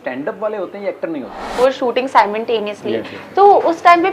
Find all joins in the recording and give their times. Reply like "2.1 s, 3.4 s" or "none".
1.6 s